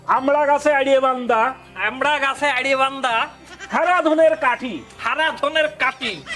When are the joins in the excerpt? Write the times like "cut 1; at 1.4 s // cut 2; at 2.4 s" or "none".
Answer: none